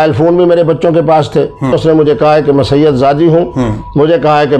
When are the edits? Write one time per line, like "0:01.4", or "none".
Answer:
0:01.8